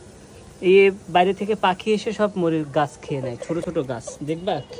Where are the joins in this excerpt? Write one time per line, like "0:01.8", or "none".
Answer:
none